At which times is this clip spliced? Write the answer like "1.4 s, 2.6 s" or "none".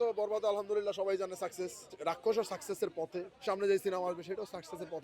1.9 s, 3.3 s

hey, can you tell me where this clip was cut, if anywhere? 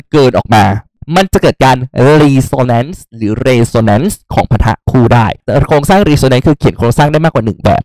1.0 s, 5.4 s

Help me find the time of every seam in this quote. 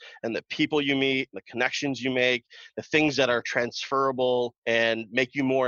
4.6 s

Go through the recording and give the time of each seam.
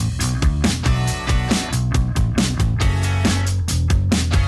1.8 s

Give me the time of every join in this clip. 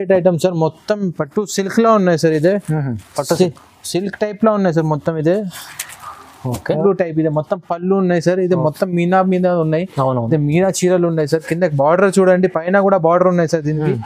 6.8 s

